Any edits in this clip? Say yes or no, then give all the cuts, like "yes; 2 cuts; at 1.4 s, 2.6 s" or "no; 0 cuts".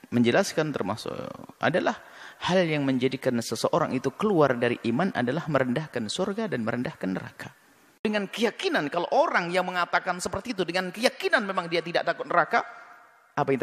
yes; 1 cut; at 8.0 s